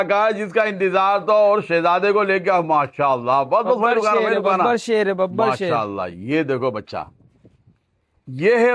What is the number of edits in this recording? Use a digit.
0